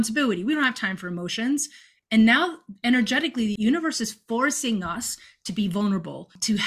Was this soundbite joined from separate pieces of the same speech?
yes; 2 cuts; at 1.9 s, 3.6 s

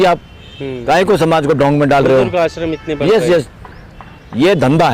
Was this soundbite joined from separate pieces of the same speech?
no; 0 cuts

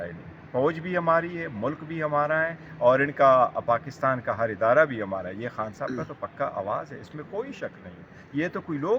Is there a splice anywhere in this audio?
no; 0 cuts

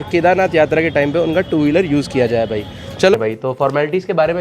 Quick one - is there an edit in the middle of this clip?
yes; 1 cut; at 3.1 s

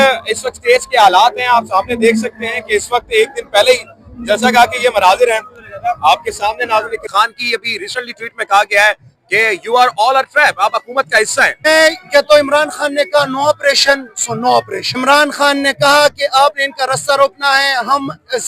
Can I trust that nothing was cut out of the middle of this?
no; 3 cuts; at 7.1 s, 11.6 s, 14.8 s

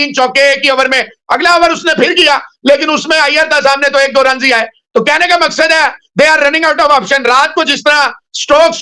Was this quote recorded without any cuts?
yes; 0 cuts

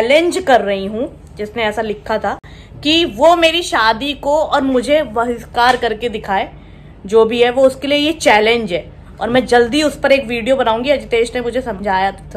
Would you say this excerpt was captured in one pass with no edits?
yes; 0 cuts

